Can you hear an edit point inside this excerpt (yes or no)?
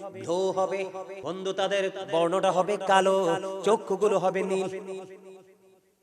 yes